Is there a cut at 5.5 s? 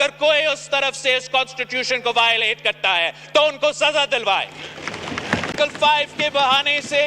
yes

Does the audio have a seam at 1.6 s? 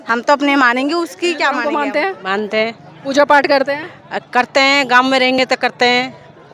yes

